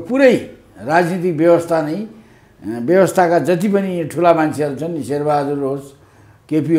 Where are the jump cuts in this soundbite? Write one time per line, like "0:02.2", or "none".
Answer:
none